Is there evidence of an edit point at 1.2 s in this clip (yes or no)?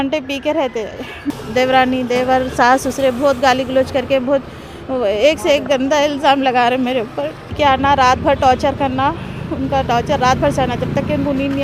yes